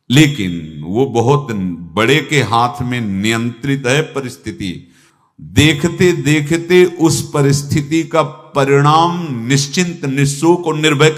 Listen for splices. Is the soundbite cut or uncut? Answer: uncut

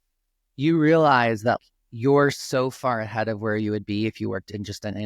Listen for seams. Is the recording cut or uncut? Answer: cut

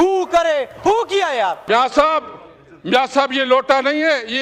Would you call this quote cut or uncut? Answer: cut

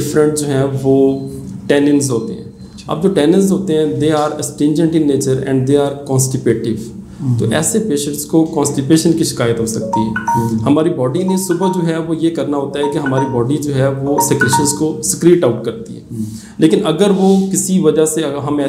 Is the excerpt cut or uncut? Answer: uncut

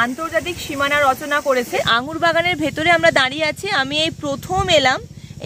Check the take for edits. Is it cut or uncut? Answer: cut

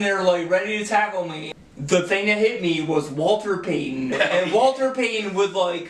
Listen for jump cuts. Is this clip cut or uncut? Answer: cut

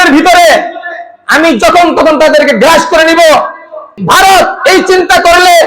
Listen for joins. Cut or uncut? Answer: cut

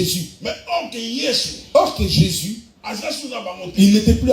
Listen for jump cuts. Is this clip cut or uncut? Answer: uncut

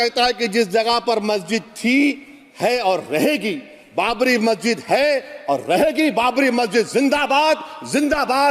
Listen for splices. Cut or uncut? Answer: uncut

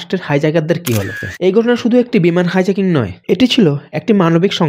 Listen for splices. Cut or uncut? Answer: cut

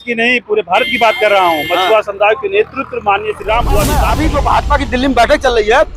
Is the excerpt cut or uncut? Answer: cut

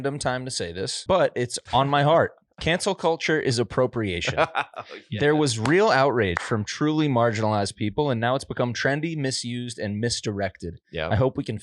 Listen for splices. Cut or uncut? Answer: cut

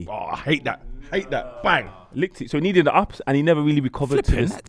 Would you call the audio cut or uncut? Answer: uncut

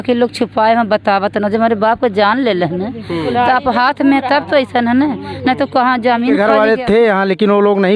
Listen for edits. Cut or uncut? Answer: cut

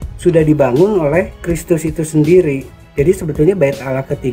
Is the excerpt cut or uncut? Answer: uncut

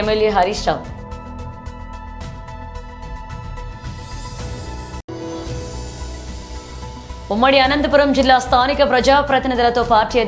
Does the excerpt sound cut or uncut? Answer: uncut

